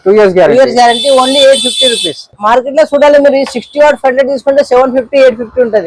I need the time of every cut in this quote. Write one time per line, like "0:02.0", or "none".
0:02.3